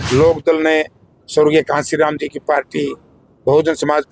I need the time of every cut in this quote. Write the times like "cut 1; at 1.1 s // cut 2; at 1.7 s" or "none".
none